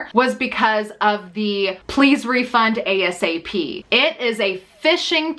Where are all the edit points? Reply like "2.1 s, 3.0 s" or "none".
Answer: 3.8 s